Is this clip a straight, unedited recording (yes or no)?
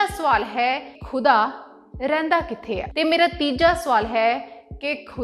no